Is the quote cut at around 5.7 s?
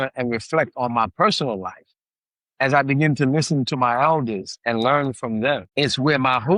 yes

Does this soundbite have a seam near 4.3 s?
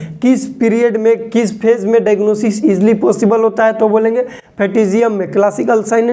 no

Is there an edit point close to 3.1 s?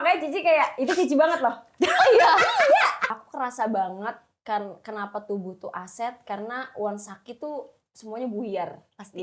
yes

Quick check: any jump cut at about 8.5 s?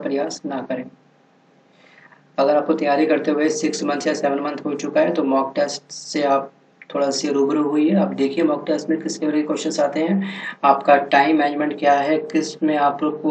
yes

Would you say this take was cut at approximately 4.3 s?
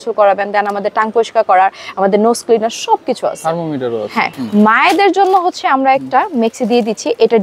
yes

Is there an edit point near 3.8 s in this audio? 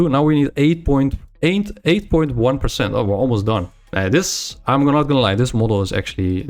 yes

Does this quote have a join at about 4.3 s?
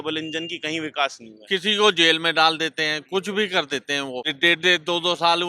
yes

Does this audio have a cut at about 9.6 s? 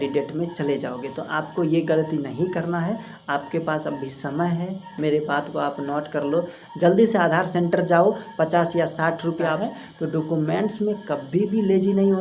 yes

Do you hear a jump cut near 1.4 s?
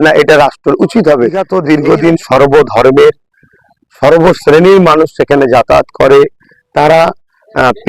yes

